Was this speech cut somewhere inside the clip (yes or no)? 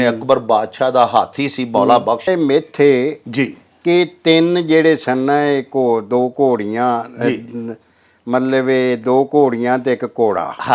yes